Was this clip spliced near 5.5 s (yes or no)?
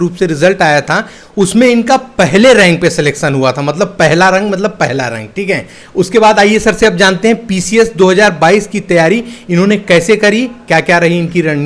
no